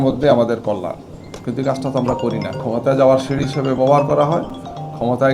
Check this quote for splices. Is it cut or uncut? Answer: uncut